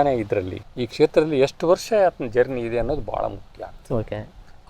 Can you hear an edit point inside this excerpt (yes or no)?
no